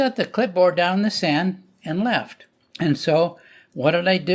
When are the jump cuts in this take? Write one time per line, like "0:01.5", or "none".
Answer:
none